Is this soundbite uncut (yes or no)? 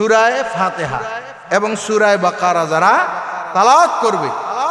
yes